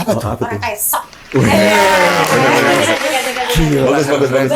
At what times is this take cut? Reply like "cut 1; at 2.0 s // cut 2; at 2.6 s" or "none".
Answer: none